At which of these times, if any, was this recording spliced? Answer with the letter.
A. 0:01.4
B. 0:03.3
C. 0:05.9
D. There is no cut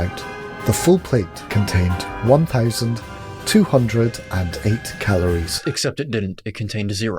A